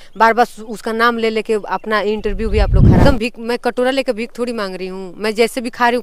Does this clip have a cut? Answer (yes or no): yes